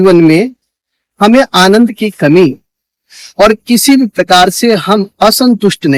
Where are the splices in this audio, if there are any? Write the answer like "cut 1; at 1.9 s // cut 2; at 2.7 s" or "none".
none